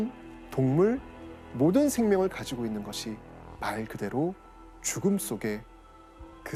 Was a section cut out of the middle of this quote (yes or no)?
no